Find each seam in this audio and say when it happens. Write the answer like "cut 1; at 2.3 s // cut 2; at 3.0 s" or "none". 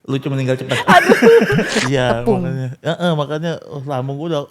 cut 1; at 1.8 s